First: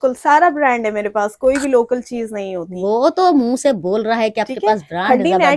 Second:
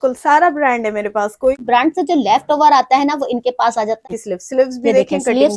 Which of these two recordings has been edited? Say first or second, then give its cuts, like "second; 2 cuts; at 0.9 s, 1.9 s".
second; 2 cuts; at 1.6 s, 4.0 s